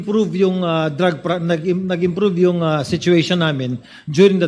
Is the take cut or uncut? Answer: uncut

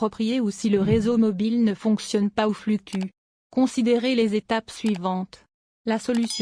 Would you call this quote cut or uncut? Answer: uncut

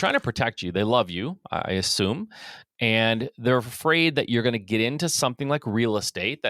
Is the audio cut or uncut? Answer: uncut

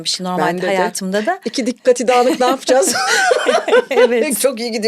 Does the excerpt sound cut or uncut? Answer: uncut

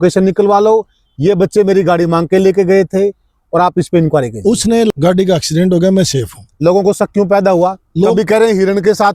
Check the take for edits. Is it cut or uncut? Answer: cut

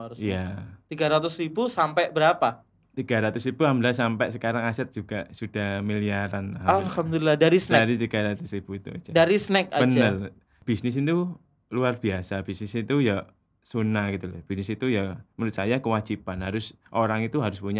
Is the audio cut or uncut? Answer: cut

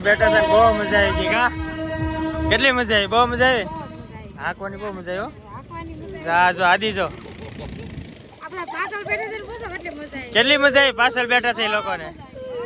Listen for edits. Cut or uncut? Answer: uncut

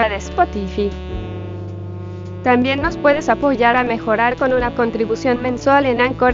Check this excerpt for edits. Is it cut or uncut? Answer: uncut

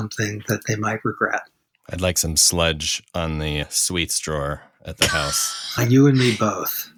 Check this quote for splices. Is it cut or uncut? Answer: uncut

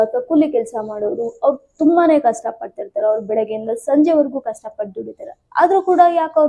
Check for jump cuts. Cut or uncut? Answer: uncut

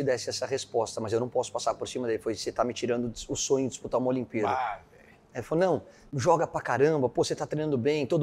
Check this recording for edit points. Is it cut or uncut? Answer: uncut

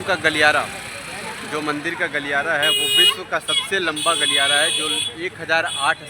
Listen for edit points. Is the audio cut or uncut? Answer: uncut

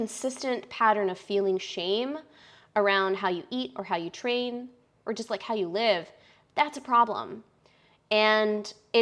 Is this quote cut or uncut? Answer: uncut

